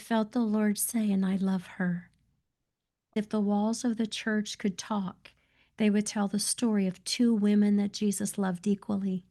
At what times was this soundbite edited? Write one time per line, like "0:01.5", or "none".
0:03.1